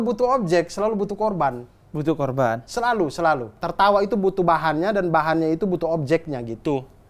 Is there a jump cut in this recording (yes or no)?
yes